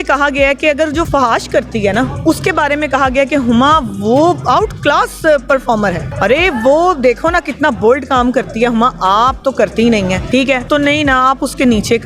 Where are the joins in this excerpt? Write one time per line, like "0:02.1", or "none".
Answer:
0:01.1
0:06.1
0:10.5